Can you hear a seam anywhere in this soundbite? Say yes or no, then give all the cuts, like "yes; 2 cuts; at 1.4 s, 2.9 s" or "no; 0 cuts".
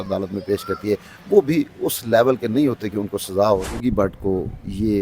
yes; 1 cut; at 3.8 s